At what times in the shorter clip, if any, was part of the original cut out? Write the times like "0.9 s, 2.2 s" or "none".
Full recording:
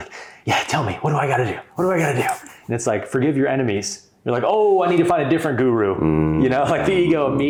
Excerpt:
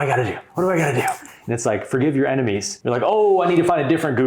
2.7 s